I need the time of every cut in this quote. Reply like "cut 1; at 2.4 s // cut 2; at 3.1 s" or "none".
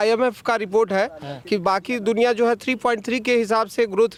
none